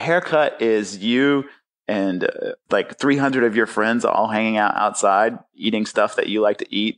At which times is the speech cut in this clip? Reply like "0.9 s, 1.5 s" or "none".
2.6 s